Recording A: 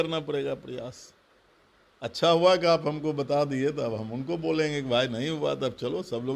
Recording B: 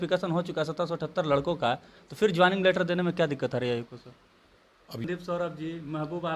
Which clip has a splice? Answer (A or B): B